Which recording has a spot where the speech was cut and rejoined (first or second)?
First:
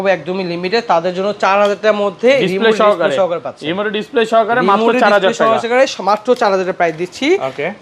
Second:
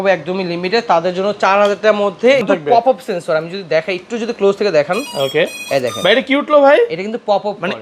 second